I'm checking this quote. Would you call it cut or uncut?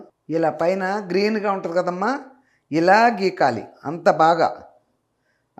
uncut